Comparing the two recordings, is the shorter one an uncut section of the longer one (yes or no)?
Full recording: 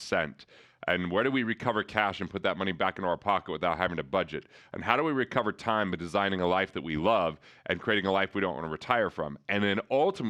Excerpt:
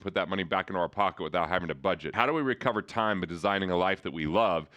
no